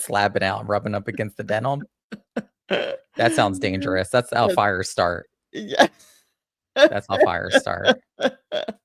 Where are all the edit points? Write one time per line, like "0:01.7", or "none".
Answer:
none